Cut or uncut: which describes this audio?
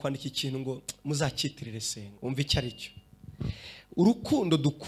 cut